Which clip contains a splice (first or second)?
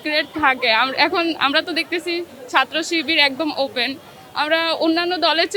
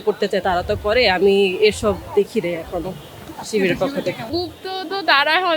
second